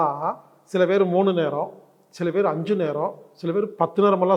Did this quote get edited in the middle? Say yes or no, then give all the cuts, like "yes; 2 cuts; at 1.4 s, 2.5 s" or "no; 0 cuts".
no; 0 cuts